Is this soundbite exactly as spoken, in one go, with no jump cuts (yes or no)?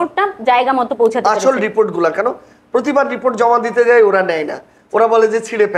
yes